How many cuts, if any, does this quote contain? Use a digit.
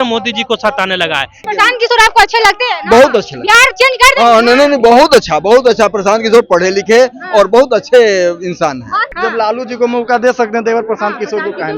2